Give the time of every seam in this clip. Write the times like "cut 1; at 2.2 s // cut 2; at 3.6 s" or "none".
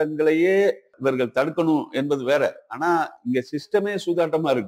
cut 1; at 0.9 s